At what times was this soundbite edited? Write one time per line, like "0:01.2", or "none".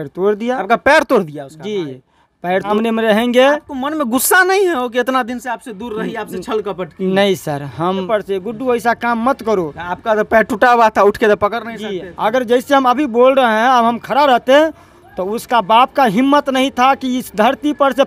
0:02.7
0:08.1